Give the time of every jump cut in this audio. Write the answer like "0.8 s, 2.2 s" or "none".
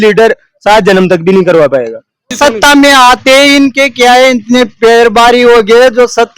2.3 s